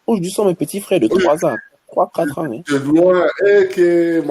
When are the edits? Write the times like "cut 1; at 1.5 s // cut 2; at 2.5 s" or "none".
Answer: none